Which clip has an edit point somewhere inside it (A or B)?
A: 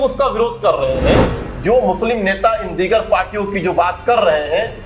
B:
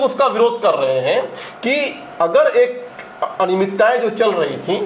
A